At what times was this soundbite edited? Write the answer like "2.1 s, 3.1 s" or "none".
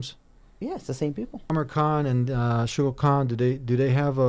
1.5 s